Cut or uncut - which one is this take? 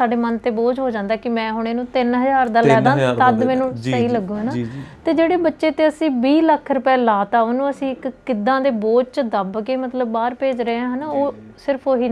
uncut